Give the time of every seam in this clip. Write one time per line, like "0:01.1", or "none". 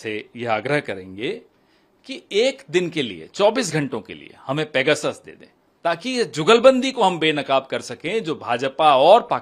none